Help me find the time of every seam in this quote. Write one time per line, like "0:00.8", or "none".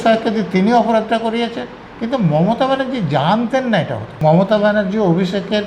0:04.0